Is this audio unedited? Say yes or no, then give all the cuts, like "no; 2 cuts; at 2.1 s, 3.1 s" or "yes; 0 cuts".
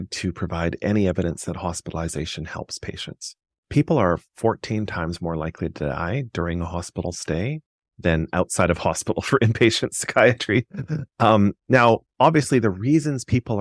yes; 0 cuts